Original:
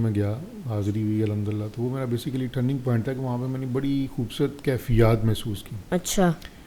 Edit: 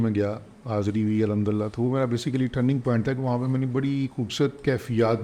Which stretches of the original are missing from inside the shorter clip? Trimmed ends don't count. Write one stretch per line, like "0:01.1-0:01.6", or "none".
none